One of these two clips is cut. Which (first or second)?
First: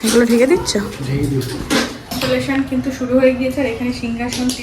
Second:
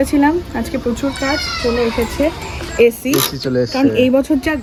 first